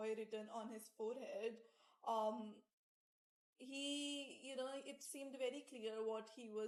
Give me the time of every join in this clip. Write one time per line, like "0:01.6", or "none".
none